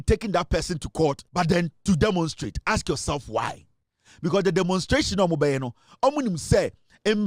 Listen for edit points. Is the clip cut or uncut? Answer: cut